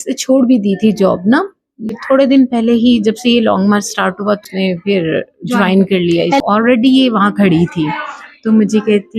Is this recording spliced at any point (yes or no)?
yes